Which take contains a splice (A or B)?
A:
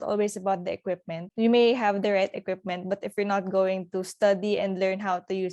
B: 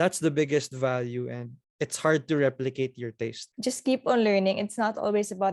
B